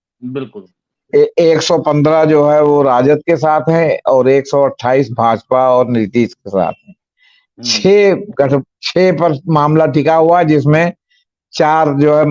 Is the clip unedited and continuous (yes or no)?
yes